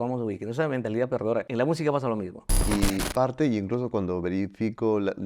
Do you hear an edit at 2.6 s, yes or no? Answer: yes